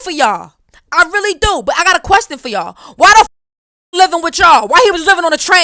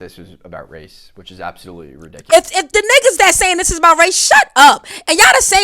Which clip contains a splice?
second; 1 cut; at 2.2 s

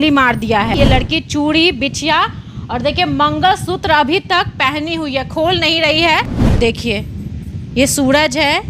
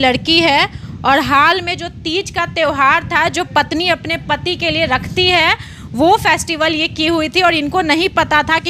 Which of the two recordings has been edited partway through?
first; 2 cuts; at 0.8 s, 6.4 s

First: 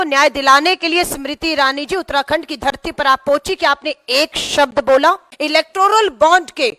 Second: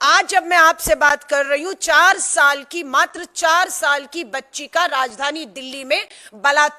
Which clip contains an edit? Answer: first; 1 cut; at 5.3 s

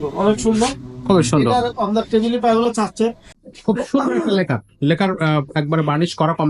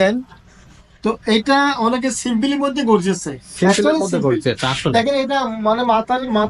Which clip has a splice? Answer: first; 1 cut; at 3.3 s

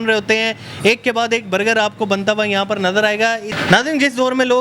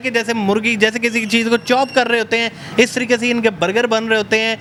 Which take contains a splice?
first; 1 cut; at 3.5 s

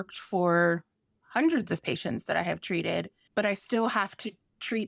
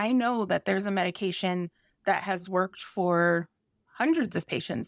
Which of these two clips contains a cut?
first; 1 cut; at 3.2 s

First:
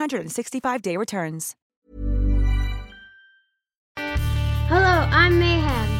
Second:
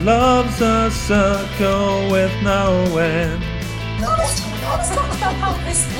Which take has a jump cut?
first; 2 cuts; at 1.6 s, 4.0 s

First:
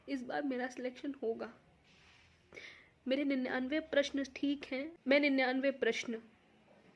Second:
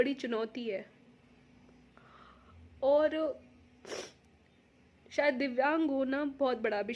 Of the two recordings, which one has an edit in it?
first; 1 cut; at 4.9 s

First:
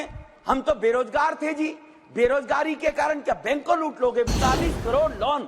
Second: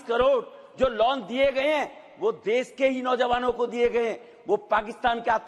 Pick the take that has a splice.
first; 1 cut; at 4.3 s

